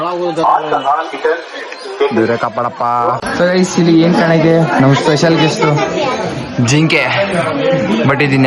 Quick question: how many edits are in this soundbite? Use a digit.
1